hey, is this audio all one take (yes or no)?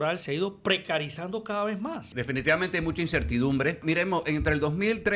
no